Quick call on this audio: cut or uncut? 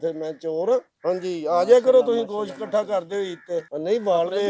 cut